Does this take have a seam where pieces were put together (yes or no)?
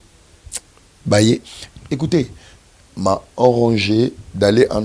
yes